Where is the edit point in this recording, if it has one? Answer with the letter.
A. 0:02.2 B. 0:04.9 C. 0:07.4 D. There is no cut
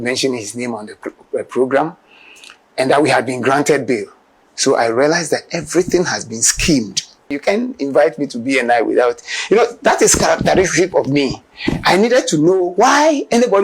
C